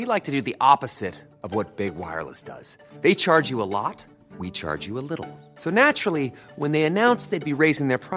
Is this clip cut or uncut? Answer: uncut